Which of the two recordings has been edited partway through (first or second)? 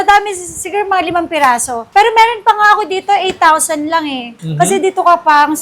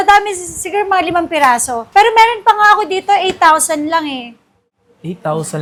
first